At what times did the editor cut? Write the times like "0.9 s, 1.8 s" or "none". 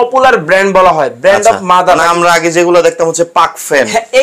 2.0 s